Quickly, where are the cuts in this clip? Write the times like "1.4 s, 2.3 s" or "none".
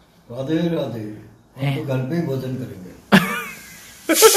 none